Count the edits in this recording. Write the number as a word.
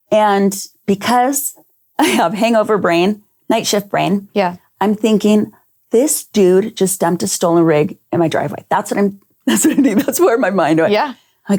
zero